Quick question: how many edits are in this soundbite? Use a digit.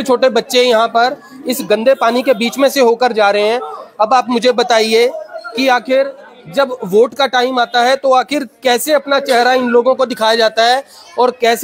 0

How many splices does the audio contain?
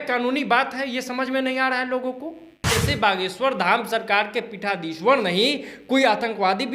1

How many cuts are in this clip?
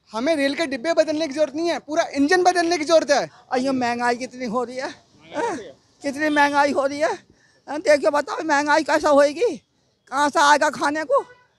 1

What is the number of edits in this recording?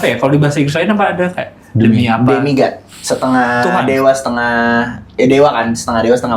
1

